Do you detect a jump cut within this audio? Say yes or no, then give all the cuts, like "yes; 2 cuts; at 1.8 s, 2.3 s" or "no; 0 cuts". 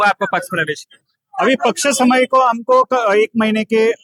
no; 0 cuts